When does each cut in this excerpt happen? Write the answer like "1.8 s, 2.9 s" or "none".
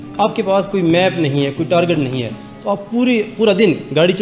none